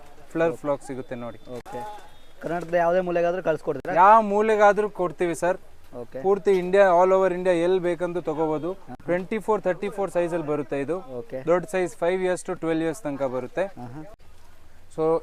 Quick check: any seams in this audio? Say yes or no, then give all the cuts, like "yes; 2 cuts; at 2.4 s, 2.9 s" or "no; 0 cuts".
no; 0 cuts